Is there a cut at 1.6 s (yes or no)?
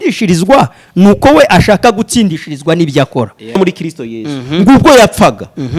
no